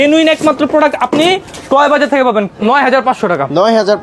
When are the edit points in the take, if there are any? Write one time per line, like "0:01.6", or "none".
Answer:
0:02.5